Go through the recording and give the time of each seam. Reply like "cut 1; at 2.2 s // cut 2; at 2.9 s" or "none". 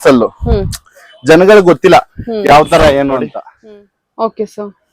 cut 1; at 3.5 s

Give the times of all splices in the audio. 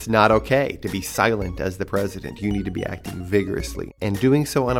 cut 1; at 3.8 s

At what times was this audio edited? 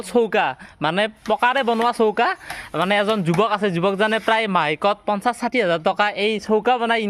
none

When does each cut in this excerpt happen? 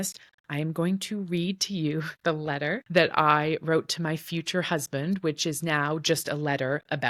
none

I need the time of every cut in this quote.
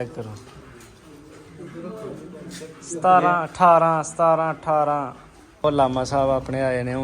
cut 1; at 5.6 s

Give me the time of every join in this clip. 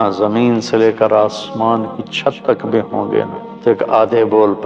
cut 1; at 3.4 s

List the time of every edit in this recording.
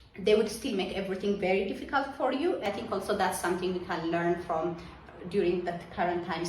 cut 1; at 2.6 s

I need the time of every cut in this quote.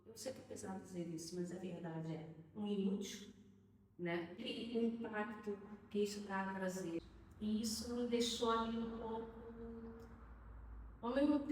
cut 1; at 4.4 s // cut 2; at 7.0 s

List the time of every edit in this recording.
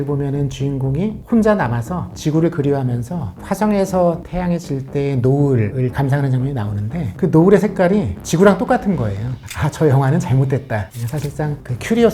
cut 1; at 9.4 s // cut 2; at 10.9 s

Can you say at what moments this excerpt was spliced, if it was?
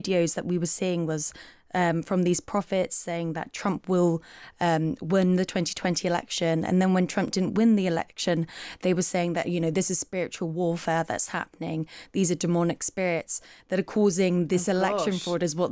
none

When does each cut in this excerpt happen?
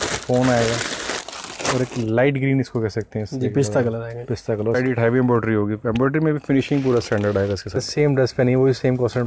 cut 1; at 4.8 s // cut 2; at 7.9 s

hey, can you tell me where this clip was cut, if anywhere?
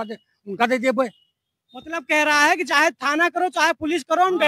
none

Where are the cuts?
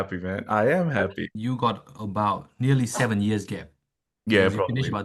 cut 1; at 1.4 s

